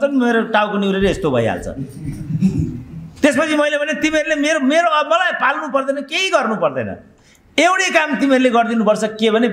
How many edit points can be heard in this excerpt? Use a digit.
0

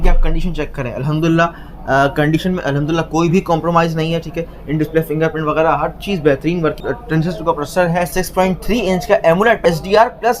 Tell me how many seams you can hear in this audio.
3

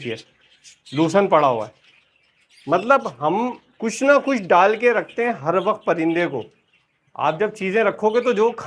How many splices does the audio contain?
0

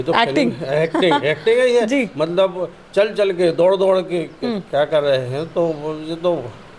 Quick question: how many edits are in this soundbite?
0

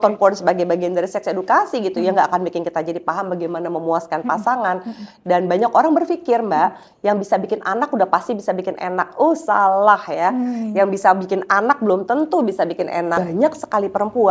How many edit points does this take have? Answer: 1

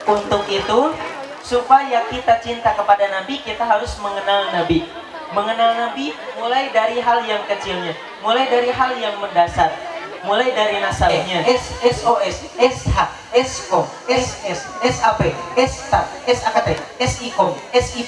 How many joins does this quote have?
1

